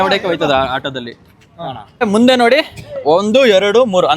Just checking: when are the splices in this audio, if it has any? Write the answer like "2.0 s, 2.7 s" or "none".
2.0 s